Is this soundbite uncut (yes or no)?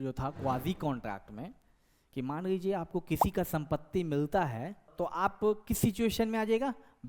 no